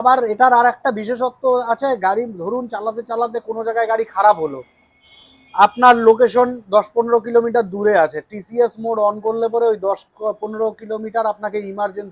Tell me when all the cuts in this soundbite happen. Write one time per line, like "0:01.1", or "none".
none